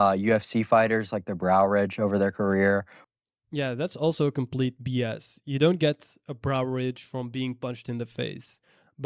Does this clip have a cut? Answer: yes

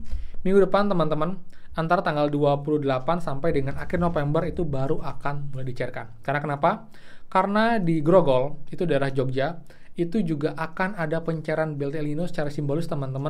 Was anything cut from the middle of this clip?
no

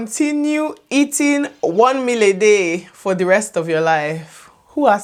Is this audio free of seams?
yes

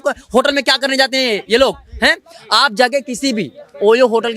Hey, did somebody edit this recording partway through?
no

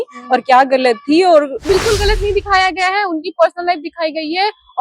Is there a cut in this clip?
yes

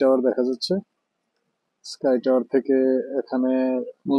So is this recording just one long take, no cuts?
yes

